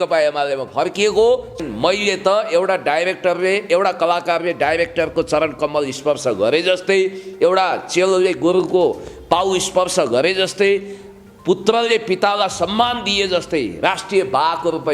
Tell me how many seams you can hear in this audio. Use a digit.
1